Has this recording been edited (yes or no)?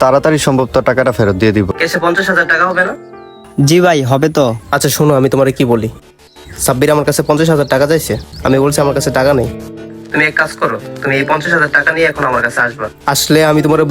yes